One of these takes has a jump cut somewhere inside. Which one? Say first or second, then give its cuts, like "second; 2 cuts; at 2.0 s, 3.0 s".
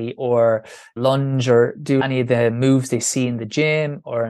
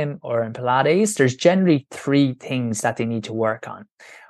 first; 2 cuts; at 1.0 s, 2.0 s